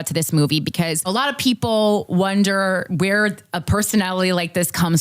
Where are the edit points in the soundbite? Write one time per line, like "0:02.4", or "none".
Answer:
0:01.1